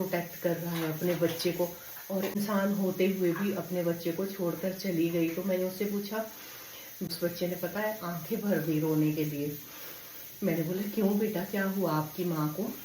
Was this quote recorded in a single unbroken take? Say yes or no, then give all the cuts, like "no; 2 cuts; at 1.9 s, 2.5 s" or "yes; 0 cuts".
no; 2 cuts; at 2.4 s, 7.1 s